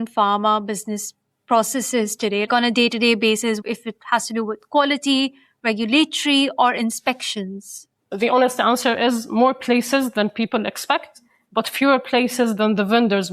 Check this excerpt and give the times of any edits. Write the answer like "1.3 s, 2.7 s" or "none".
3.6 s, 8.1 s